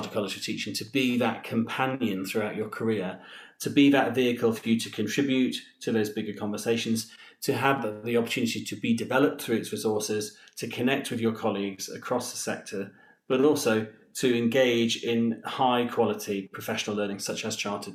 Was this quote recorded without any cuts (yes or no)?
yes